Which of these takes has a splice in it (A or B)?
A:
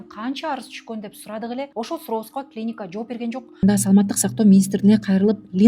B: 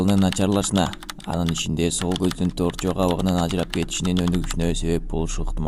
A